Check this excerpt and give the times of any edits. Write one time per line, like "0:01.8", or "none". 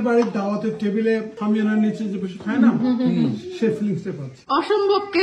0:01.3
0:04.3